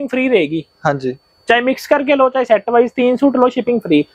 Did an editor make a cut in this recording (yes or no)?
no